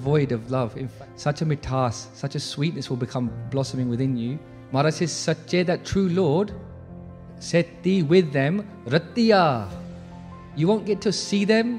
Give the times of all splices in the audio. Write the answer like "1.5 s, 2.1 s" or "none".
0.9 s, 4.5 s